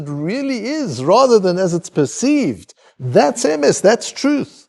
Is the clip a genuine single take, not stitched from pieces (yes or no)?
yes